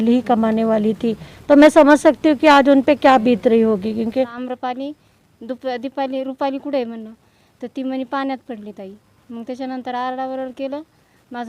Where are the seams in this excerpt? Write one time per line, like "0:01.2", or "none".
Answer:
0:04.4